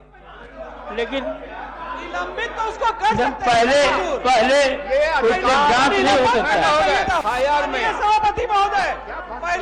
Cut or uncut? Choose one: cut